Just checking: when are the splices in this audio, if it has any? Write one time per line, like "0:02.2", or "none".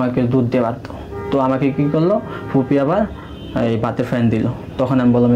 none